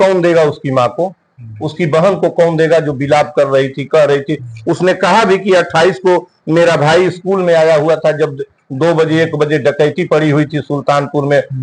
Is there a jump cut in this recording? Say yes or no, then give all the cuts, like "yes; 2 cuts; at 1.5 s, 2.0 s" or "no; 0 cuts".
no; 0 cuts